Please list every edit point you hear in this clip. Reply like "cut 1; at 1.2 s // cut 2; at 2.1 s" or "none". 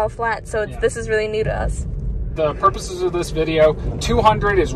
cut 1; at 2.3 s